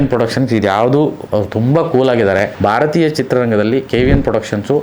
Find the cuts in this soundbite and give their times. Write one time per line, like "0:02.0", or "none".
0:01.2
0:02.5